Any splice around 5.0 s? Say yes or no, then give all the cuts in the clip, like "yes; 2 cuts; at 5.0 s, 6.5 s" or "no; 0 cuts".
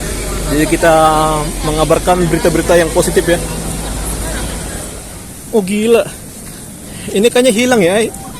yes; 1 cut; at 5.0 s